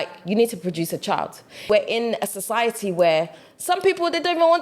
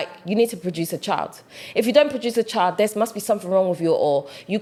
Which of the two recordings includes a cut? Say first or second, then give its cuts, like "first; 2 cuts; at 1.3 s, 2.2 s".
first; 1 cut; at 1.6 s